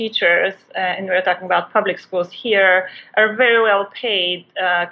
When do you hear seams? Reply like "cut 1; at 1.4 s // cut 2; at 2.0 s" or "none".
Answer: none

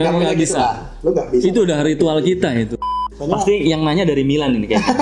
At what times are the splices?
cut 1; at 2.8 s

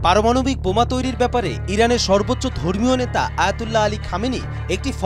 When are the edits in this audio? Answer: none

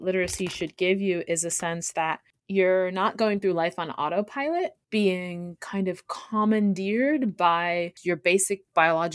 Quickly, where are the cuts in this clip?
cut 1; at 2.3 s // cut 2; at 4.8 s // cut 3; at 7.9 s

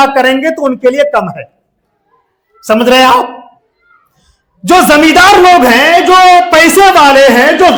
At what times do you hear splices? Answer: none

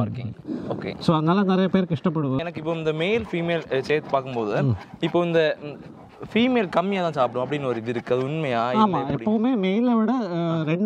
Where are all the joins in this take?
cut 1; at 2.4 s

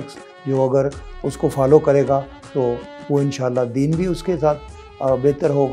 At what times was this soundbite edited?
none

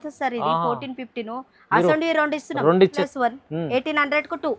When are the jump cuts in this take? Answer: cut 1; at 3.0 s

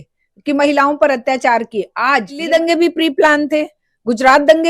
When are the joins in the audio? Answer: cut 1; at 2.4 s

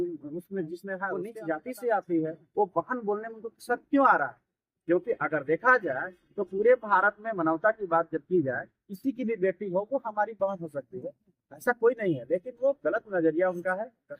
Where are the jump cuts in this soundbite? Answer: cut 1; at 1.3 s

